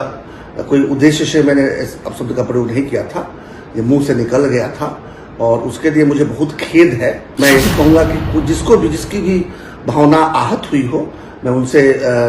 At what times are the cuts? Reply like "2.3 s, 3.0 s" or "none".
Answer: 7.2 s